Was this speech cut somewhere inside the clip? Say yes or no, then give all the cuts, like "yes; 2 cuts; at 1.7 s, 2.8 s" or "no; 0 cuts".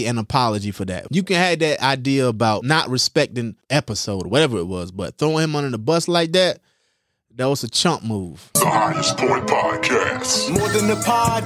yes; 4 cuts; at 1.0 s, 2.6 s, 3.6 s, 8.4 s